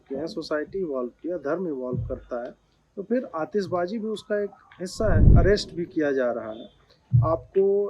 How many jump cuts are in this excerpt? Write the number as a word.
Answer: one